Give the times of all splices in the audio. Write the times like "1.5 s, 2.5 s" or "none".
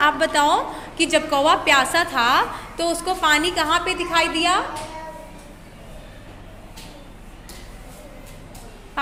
none